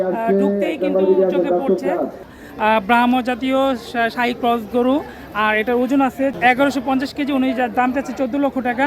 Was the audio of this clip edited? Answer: yes; 2 cuts; at 2.3 s, 6.3 s

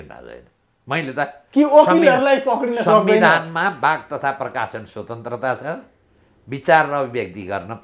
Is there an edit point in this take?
no; 0 cuts

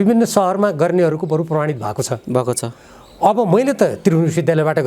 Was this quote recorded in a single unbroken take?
yes; 0 cuts

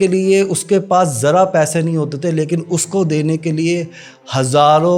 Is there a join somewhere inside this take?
no; 0 cuts

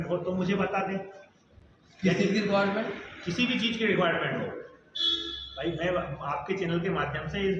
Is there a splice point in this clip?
no; 0 cuts

